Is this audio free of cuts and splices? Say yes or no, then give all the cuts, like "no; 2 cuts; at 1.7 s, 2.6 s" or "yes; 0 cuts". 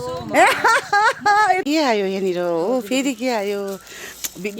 no; 1 cut; at 1.6 s